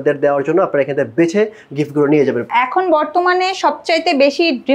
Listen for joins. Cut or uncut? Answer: cut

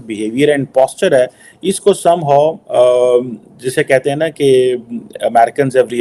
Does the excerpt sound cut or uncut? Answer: uncut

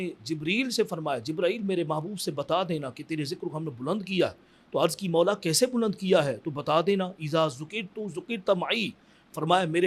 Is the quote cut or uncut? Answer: uncut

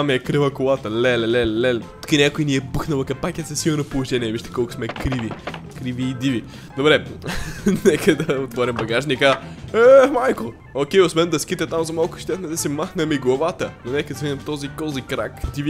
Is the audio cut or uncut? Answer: uncut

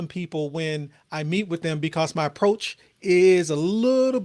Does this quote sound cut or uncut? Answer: uncut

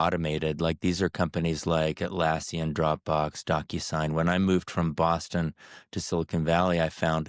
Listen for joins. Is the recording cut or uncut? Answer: uncut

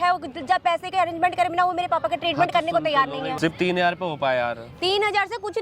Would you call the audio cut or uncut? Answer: cut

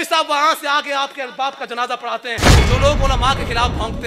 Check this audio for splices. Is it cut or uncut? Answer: cut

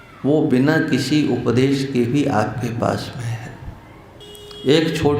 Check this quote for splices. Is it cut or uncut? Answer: cut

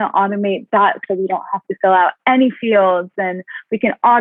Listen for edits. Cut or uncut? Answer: uncut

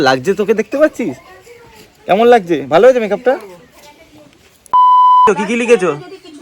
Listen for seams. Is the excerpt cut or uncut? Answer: cut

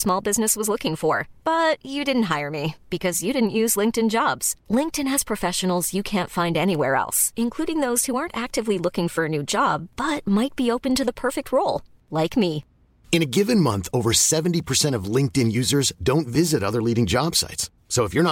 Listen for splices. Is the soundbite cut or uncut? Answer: uncut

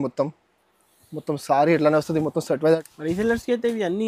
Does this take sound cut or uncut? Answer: cut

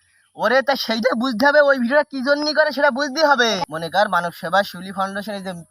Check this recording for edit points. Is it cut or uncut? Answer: cut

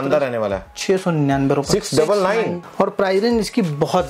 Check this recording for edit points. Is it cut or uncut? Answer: cut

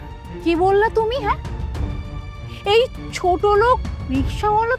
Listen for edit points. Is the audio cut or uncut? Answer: uncut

